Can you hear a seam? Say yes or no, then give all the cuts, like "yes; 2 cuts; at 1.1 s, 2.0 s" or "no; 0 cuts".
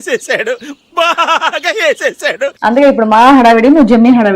yes; 1 cut; at 2.5 s